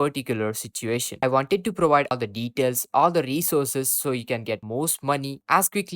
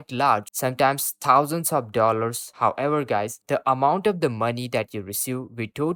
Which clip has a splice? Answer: first; 2 cuts; at 1.1 s, 2.1 s

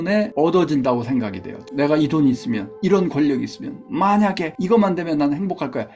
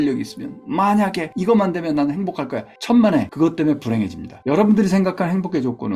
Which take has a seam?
first; 1 cut; at 1.6 s

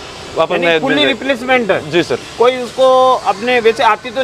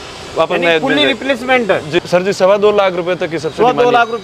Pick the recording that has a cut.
second; 1 cut; at 2.0 s

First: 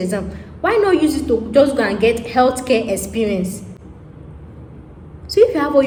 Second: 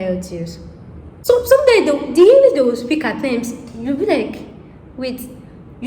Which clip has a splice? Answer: second; 1 cut; at 1.1 s

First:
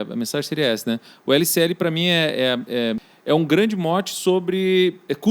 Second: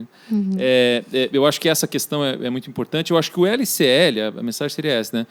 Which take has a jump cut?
first; 1 cut; at 3.1 s

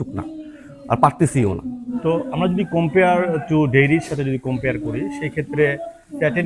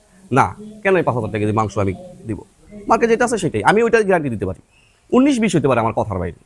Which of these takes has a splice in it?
first; 1 cut; at 2.0 s

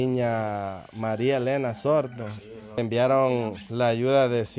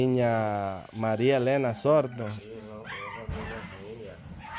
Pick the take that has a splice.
first; 1 cut; at 2.8 s

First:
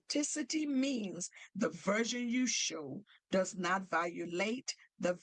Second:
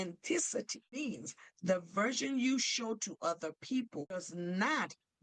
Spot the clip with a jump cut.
second; 2 cuts; at 1.0 s, 4.2 s

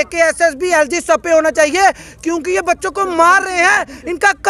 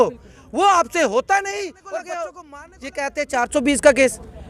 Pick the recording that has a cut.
second; 1 cut; at 2.3 s

